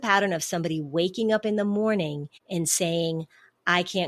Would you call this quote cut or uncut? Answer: cut